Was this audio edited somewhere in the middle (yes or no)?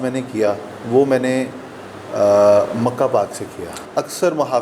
yes